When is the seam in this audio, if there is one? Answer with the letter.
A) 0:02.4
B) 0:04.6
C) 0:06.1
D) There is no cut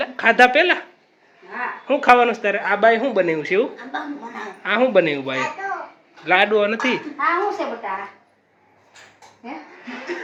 D